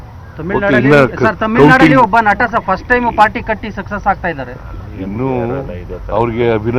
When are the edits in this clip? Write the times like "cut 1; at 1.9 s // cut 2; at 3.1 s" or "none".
none